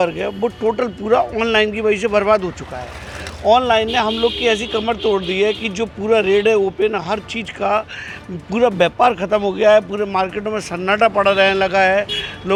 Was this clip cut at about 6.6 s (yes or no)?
no